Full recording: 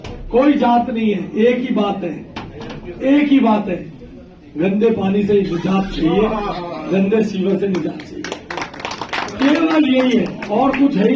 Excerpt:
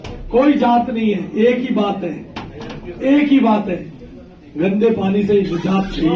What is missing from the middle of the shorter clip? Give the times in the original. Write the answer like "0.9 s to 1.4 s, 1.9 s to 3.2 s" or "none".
none

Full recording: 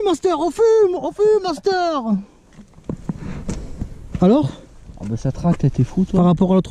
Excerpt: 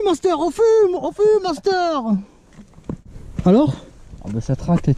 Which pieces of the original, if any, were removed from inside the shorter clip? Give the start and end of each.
3.0 s to 3.8 s

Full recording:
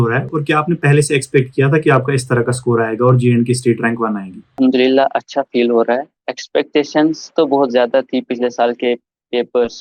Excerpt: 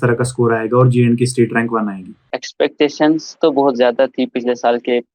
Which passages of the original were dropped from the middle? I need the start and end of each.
4.4 s to 6.1 s

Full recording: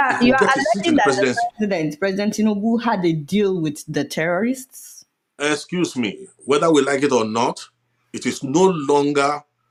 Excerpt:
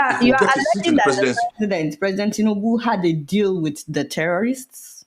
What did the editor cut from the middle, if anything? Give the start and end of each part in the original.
none

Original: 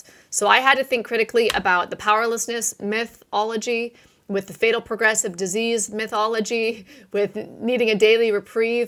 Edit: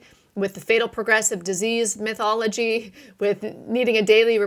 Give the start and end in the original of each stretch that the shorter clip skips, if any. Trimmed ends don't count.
none

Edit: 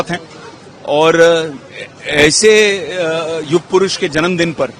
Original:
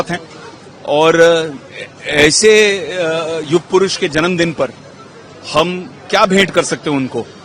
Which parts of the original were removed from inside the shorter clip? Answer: none

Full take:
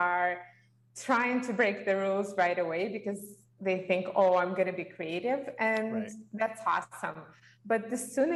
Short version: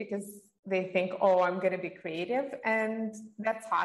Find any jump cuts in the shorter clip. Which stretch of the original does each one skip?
none

